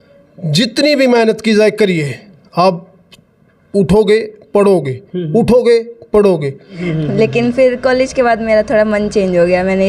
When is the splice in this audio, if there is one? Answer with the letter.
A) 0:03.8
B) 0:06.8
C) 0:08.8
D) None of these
B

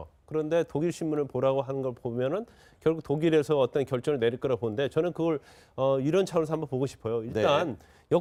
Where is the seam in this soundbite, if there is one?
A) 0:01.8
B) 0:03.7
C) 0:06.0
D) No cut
D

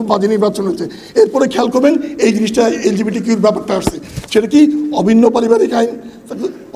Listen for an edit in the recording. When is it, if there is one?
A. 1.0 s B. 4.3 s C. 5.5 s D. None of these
D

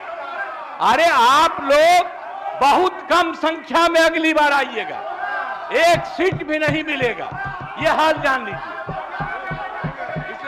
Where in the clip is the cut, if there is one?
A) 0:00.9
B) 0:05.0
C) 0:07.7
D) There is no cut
D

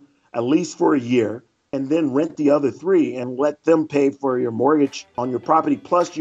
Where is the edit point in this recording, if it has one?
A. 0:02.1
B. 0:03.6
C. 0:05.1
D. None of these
C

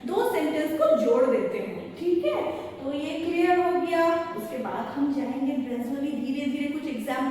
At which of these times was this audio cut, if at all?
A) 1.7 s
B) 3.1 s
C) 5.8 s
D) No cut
D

